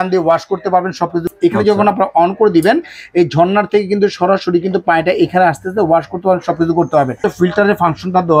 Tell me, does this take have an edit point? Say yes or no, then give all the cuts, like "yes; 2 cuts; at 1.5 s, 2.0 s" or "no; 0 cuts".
yes; 2 cuts; at 1.3 s, 7.2 s